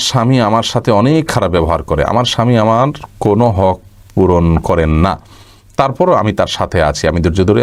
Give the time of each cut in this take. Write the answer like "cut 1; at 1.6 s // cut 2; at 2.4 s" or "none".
none